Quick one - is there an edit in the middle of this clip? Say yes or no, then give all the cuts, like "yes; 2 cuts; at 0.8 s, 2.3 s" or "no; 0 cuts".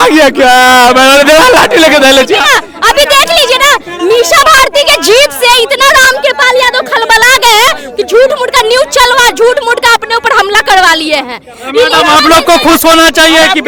no; 0 cuts